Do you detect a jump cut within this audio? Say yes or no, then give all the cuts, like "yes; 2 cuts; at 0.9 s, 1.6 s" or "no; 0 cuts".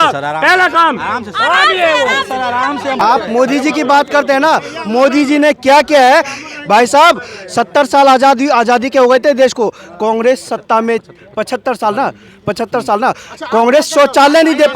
yes; 1 cut; at 3.0 s